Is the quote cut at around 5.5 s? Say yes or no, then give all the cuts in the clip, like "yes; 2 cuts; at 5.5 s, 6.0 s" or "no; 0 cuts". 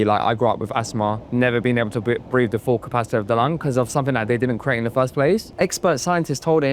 yes; 2 cuts; at 1.2 s, 5.5 s